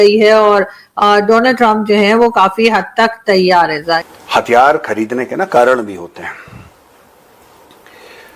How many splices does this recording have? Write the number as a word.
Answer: one